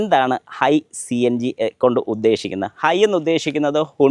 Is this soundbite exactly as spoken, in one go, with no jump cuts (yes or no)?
yes